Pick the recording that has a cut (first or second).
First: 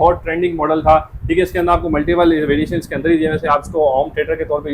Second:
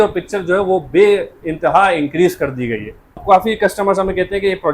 second